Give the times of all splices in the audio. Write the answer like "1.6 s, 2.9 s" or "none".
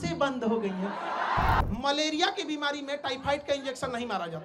1.6 s